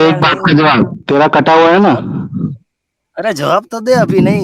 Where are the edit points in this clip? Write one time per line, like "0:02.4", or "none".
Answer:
0:01.0